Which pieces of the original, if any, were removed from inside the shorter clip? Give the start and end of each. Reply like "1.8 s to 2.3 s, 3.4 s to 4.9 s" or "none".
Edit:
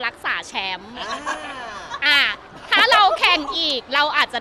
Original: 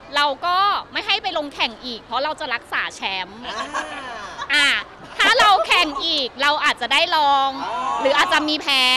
none